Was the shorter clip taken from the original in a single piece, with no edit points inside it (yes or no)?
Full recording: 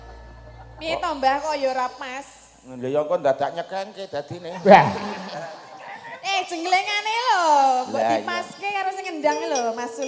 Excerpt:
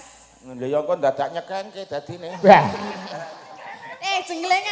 yes